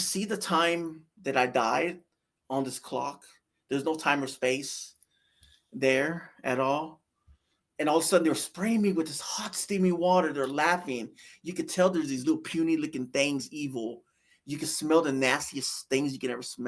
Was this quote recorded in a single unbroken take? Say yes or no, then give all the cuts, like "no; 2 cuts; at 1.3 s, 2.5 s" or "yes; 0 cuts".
yes; 0 cuts